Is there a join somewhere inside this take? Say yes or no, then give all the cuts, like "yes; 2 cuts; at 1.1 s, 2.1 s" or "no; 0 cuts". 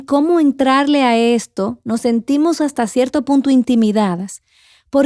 yes; 1 cut; at 2.7 s